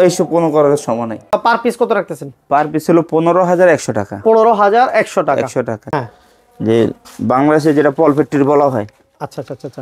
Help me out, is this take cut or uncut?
cut